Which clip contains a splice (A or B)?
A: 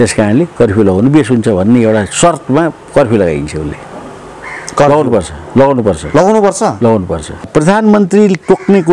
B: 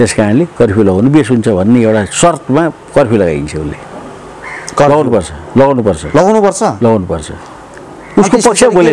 A